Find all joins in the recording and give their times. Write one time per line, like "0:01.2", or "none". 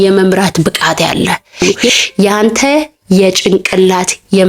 0:01.8